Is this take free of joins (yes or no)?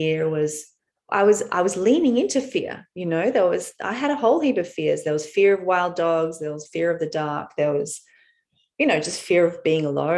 yes